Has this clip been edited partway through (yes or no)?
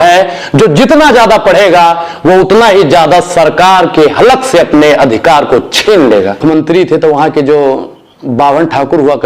yes